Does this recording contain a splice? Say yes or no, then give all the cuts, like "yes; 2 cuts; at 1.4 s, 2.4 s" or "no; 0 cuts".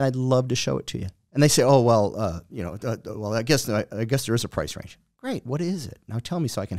no; 0 cuts